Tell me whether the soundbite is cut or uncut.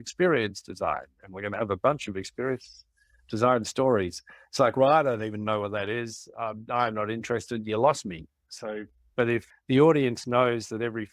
cut